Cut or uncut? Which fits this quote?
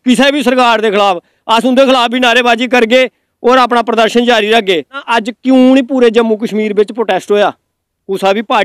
cut